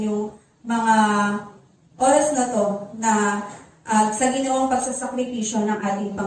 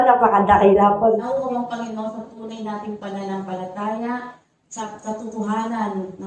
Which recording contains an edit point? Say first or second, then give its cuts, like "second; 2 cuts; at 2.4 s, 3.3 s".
second; 2 cuts; at 1.2 s, 4.8 s